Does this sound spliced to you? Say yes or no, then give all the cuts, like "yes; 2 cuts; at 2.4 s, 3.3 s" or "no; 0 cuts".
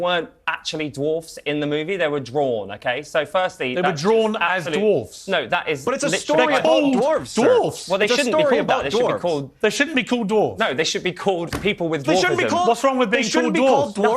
yes; 2 cuts; at 3.9 s, 13.1 s